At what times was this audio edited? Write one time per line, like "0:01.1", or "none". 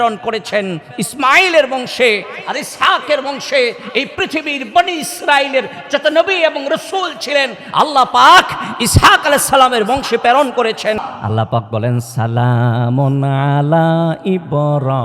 0:11.0